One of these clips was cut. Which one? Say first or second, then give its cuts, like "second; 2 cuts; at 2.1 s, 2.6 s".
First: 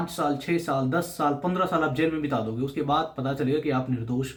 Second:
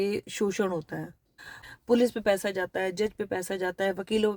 second; 1 cut; at 1.5 s